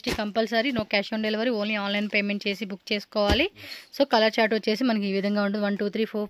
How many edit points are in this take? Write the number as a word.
zero